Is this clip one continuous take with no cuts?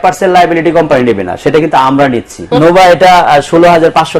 no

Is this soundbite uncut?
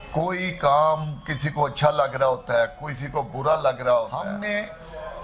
no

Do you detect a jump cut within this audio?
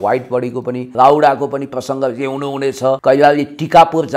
yes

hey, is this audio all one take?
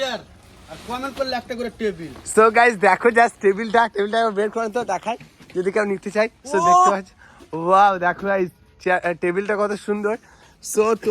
yes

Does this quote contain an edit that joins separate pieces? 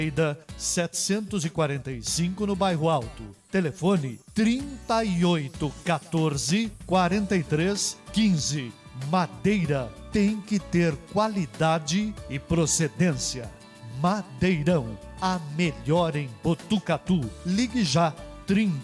no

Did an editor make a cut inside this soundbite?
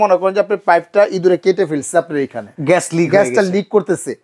yes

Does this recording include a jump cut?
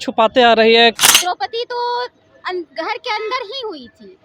yes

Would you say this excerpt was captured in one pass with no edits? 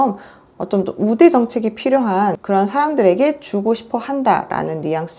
no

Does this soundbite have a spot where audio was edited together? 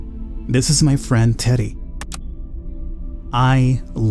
yes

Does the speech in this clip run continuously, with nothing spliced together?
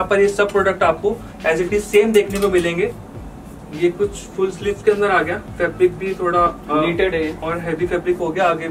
no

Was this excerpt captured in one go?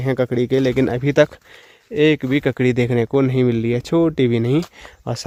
yes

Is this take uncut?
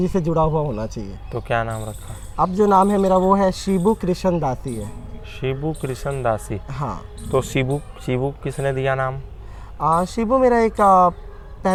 yes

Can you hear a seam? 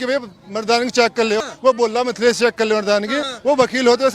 yes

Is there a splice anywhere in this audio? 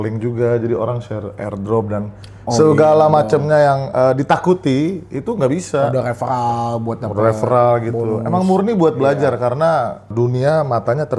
yes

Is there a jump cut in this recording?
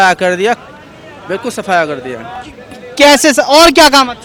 no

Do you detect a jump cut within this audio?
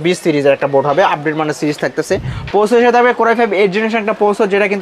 yes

